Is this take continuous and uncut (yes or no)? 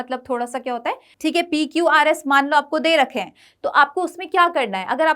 no